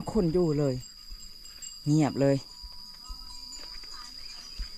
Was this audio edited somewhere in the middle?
no; 0 cuts

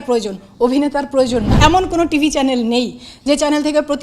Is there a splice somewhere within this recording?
yes; 1 cut; at 1.5 s

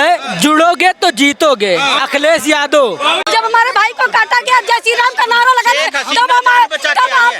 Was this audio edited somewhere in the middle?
yes; 1 cut; at 3.3 s

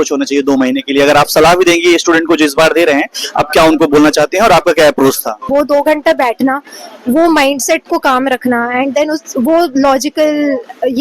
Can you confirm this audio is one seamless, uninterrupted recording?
no; 1 cut; at 5.4 s

